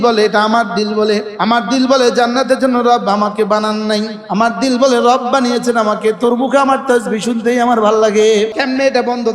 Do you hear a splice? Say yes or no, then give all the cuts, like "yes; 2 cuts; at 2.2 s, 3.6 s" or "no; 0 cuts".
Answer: yes; 3 cuts; at 1.3 s, 4.2 s, 8.6 s